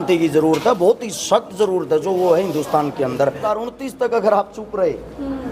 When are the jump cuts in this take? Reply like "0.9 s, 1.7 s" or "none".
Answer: 3.4 s